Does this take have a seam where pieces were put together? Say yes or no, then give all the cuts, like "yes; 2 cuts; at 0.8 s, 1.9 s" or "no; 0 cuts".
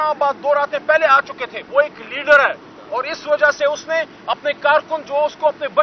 yes; 1 cut; at 1.6 s